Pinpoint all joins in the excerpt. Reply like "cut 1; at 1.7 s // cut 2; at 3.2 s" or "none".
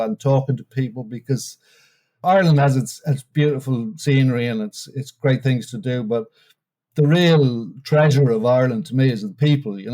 cut 1; at 2.2 s // cut 2; at 3.3 s